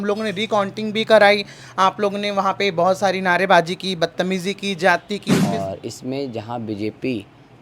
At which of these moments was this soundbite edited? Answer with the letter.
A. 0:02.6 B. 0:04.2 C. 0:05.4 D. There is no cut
C